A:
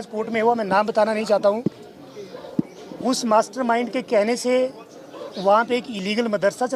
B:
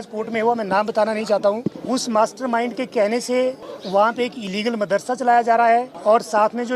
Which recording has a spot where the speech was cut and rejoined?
B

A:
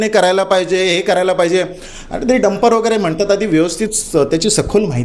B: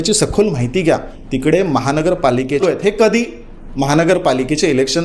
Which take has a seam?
B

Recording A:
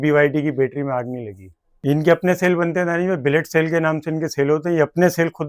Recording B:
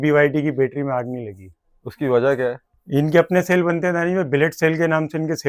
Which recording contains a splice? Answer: A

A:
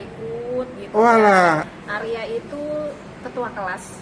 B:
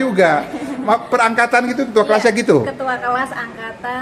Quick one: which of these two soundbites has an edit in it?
A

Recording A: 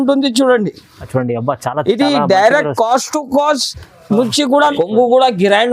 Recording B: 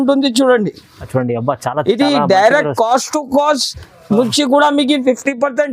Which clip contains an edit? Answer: A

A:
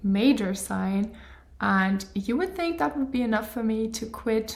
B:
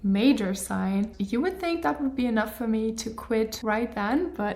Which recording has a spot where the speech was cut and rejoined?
B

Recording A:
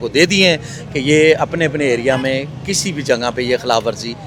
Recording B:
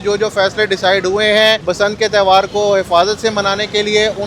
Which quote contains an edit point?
B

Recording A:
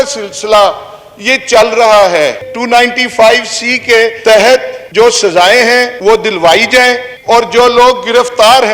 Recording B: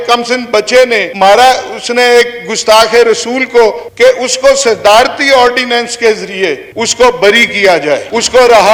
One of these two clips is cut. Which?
A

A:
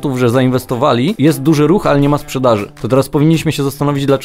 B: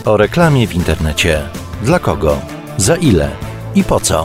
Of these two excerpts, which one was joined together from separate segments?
A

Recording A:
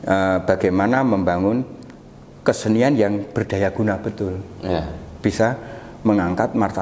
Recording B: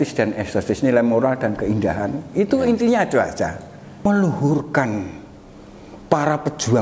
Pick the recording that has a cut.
B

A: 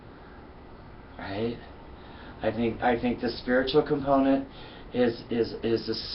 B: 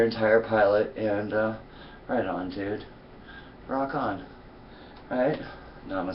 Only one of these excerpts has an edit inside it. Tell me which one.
A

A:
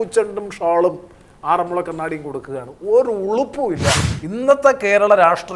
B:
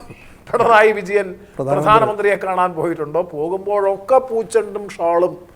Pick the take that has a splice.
A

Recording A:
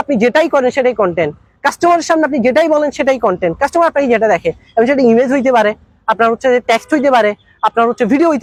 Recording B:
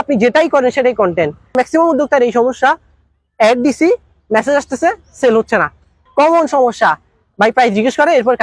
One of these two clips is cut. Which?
B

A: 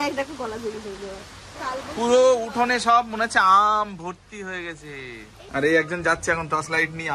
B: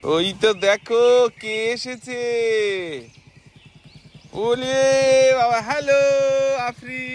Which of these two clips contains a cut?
A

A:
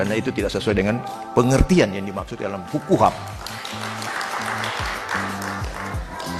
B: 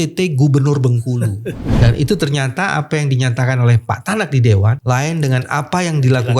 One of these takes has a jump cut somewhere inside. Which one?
B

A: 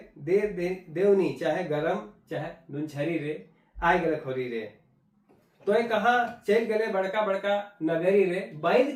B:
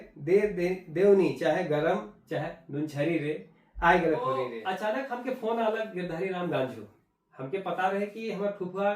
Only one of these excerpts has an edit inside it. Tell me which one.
B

